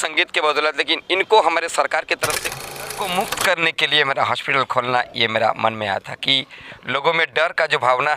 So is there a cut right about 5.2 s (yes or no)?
no